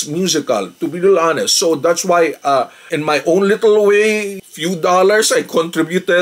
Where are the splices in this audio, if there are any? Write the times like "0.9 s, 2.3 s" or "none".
none